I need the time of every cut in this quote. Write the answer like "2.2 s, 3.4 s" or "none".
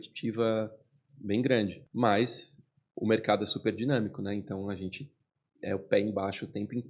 1.8 s